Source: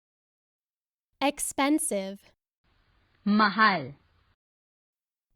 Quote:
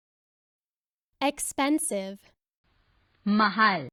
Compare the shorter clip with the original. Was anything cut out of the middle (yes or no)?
no